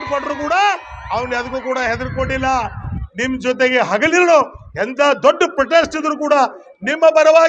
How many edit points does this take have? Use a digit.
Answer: 1